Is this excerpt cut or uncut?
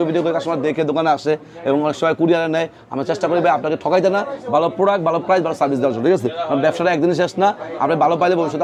uncut